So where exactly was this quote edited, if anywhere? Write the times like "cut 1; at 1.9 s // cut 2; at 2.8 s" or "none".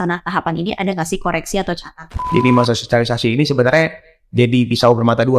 cut 1; at 1.9 s